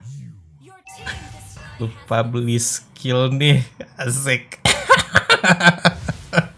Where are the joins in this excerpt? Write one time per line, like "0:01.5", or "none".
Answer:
0:01.6